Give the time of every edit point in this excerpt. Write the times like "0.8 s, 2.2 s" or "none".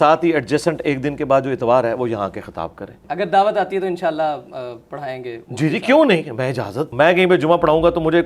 3.0 s, 6.9 s